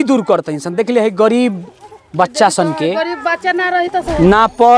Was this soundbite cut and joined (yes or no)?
no